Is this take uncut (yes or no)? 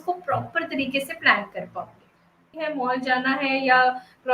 no